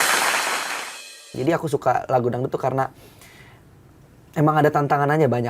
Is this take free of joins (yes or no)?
no